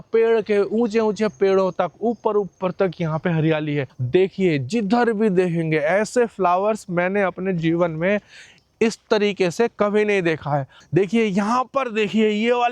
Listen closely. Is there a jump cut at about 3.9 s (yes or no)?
yes